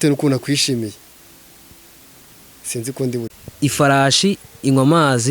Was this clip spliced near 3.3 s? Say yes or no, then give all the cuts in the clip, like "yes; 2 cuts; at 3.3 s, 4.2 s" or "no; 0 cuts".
yes; 1 cut; at 3.3 s